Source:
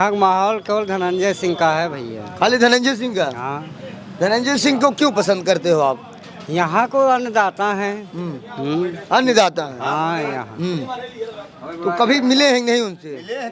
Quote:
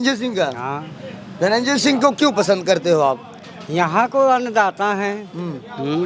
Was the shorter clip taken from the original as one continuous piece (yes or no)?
yes